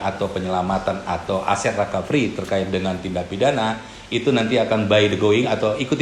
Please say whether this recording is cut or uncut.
uncut